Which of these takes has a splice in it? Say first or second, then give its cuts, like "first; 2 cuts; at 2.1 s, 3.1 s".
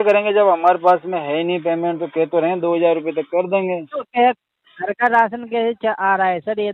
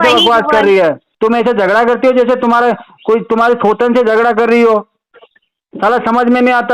second; 1 cut; at 1.1 s